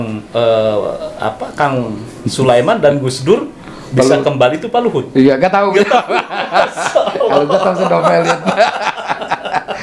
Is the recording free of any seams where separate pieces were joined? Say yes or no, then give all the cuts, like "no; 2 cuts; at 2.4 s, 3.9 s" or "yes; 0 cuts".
yes; 0 cuts